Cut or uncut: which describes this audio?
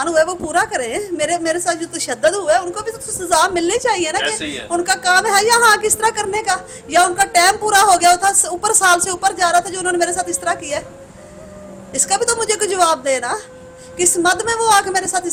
uncut